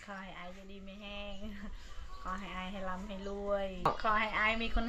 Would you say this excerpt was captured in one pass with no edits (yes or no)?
no